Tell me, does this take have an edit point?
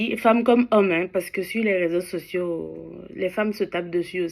no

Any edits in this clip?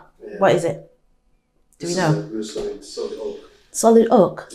no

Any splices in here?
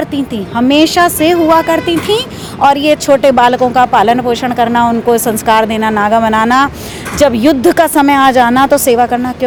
no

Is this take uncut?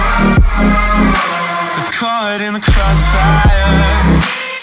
no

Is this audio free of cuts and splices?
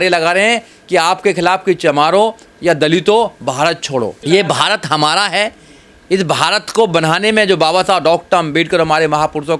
no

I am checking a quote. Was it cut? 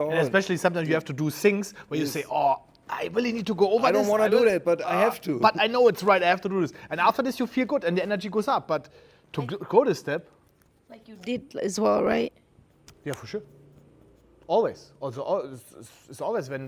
no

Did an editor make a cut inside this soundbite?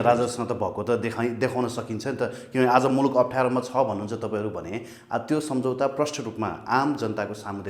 no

